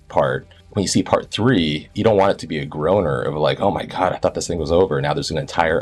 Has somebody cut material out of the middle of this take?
no; 0 cuts

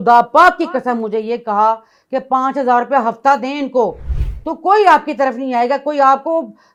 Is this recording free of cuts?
yes; 0 cuts

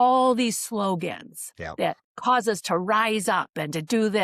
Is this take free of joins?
yes; 0 cuts

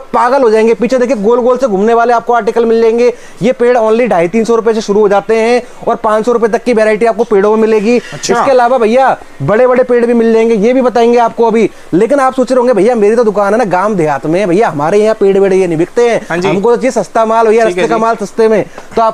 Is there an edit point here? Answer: no; 0 cuts

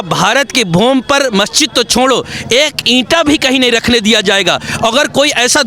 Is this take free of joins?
yes; 0 cuts

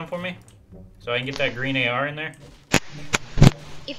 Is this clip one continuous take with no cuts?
yes; 0 cuts

